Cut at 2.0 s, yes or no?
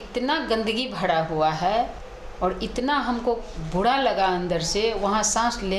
yes